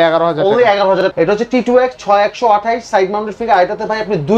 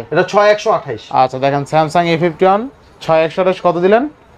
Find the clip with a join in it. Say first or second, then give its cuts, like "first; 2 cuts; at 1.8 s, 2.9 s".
first; 1 cut; at 1.1 s